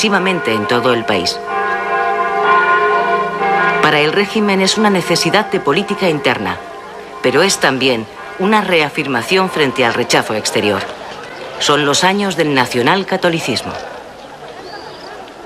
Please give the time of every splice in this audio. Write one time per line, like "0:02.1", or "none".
0:12.7